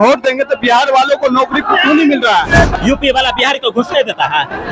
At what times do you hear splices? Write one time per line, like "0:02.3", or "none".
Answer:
0:02.7